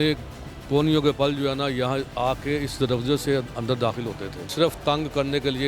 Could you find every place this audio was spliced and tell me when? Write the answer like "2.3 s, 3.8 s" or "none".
4.5 s